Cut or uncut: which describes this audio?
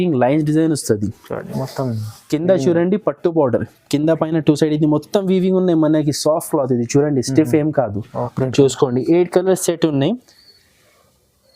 cut